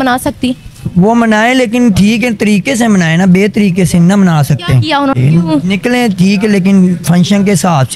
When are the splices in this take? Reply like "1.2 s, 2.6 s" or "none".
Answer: 5.1 s

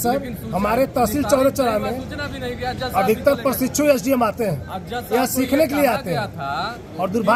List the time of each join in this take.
none

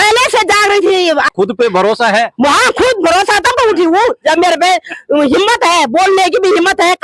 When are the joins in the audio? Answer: 1.3 s

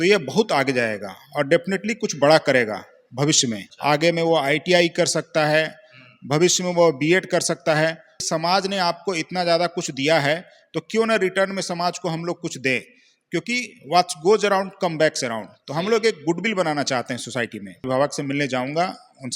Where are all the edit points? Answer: 3.7 s, 8.1 s, 17.9 s

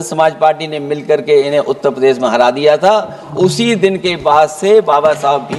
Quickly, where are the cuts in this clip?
none

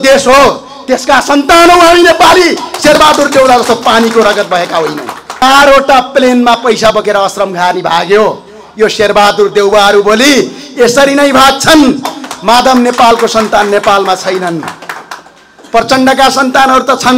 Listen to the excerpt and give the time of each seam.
5.4 s

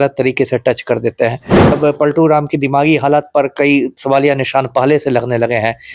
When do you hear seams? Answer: 1.7 s

